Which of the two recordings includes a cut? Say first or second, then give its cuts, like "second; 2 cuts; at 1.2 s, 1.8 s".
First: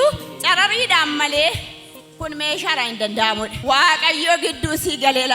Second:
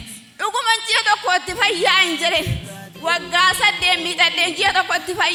first; 1 cut; at 3.5 s